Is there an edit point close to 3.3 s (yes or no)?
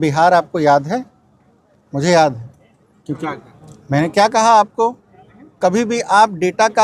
yes